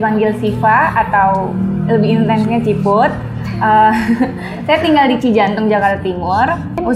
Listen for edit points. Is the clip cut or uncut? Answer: uncut